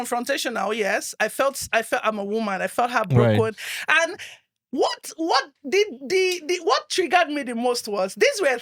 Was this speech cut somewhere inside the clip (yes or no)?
no